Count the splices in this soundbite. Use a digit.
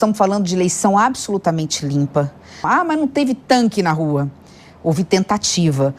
1